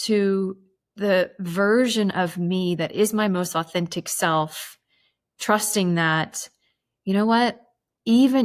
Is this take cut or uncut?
uncut